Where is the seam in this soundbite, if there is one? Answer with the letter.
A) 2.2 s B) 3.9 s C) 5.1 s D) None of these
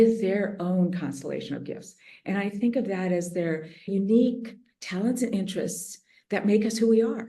B